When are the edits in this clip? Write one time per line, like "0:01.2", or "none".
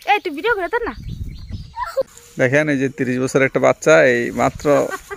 0:02.2